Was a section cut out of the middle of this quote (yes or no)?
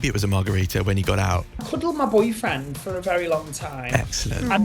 yes